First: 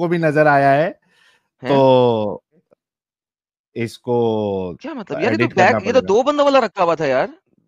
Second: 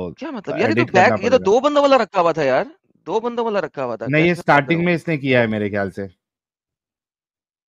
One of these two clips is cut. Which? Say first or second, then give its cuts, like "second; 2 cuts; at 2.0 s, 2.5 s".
first; 1 cut; at 2.7 s